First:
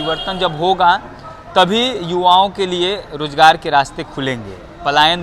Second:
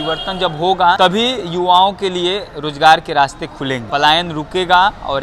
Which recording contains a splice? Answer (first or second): second